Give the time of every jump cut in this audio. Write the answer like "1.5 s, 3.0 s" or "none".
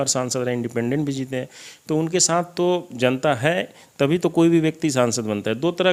none